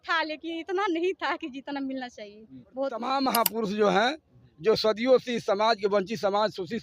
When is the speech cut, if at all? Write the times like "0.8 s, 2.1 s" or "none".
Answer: 3.0 s